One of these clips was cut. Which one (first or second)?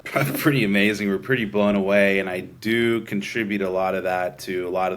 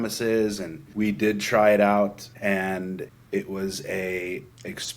second